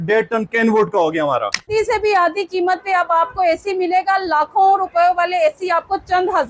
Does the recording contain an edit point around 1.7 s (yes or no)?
yes